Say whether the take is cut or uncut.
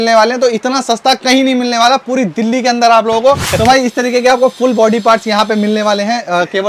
cut